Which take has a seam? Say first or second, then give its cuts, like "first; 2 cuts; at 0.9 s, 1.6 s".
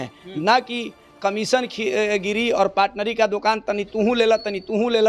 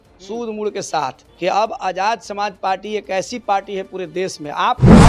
second; 1 cut; at 1.2 s